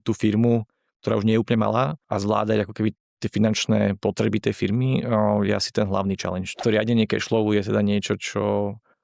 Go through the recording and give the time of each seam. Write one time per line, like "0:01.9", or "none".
0:02.0
0:06.6